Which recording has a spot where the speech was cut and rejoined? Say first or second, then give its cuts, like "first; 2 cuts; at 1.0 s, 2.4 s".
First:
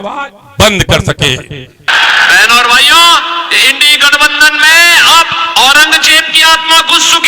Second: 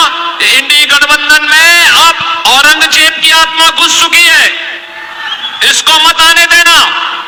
first; 1 cut; at 1.9 s